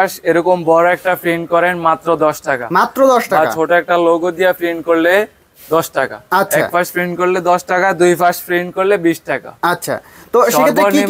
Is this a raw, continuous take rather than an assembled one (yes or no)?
yes